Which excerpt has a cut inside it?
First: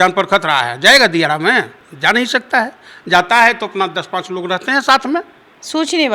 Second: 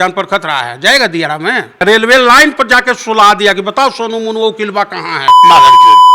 second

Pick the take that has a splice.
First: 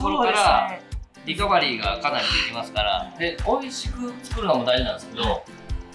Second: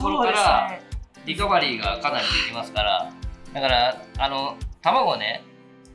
first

